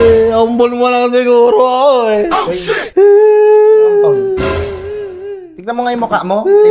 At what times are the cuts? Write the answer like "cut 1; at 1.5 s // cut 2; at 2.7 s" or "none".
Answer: none